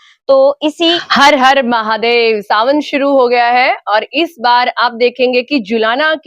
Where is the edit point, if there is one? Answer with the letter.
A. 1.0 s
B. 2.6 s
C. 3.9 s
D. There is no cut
A